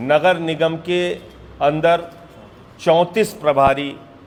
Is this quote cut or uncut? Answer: uncut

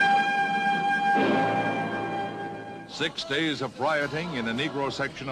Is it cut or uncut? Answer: uncut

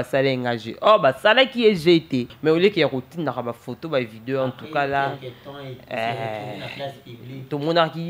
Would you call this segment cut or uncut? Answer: cut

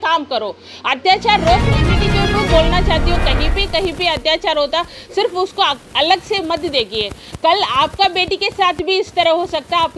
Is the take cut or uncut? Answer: cut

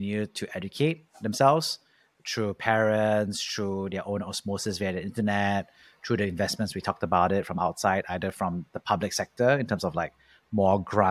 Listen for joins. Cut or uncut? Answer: uncut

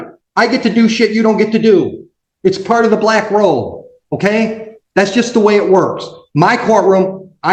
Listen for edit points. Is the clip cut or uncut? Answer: uncut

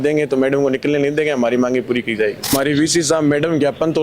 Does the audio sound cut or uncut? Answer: cut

